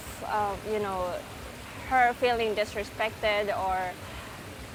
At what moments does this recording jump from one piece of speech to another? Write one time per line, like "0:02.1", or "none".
none